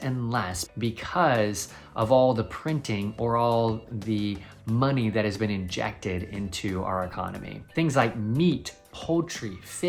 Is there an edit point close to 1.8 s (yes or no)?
no